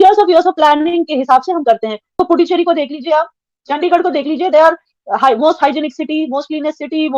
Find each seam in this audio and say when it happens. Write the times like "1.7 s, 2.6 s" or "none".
2.2 s